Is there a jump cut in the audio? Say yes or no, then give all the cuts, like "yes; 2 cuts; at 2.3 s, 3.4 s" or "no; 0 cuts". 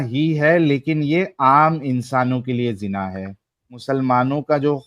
yes; 1 cut; at 3.7 s